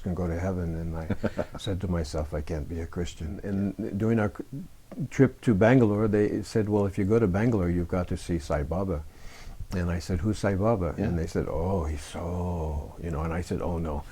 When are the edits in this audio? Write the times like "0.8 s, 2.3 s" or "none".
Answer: 3.4 s